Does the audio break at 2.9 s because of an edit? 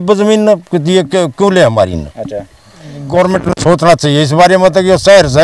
yes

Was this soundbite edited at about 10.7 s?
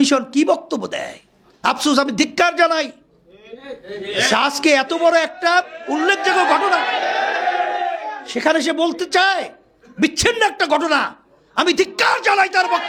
no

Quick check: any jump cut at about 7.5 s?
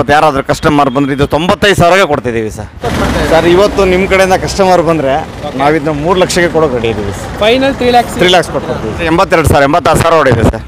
no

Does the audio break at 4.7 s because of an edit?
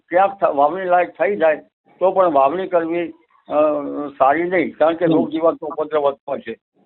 no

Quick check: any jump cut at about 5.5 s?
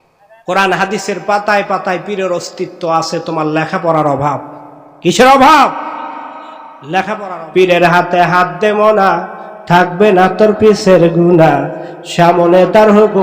no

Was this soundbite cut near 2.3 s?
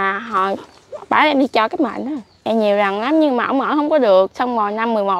yes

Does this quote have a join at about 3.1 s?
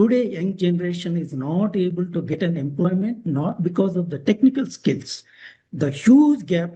no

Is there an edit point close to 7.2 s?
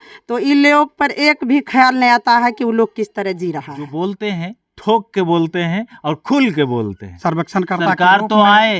yes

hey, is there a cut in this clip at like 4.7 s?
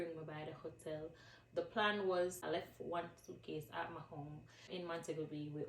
yes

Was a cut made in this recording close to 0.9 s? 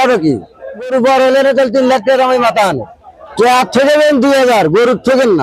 yes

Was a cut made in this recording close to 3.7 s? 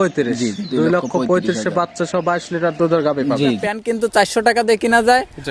yes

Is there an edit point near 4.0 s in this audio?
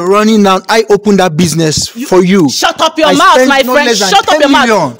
no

